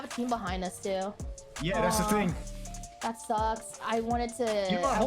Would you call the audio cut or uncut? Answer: cut